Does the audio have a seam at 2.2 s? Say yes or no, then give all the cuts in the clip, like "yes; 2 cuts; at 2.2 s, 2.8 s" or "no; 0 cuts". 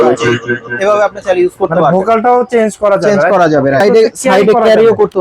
no; 1 cut; at 3.8 s